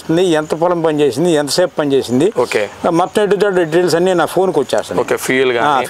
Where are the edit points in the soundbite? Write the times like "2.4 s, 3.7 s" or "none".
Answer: none